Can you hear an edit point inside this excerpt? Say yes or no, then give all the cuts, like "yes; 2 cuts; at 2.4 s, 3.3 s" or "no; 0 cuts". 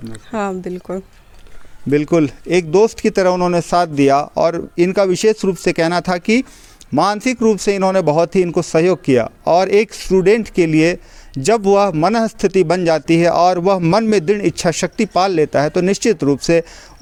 no; 0 cuts